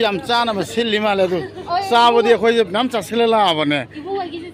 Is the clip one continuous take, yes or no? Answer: yes